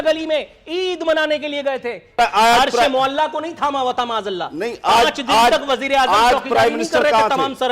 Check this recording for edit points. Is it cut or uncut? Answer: cut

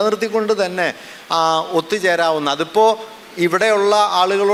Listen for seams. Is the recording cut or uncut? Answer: uncut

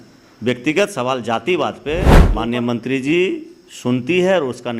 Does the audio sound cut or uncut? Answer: cut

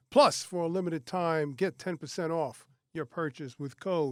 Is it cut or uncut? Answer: uncut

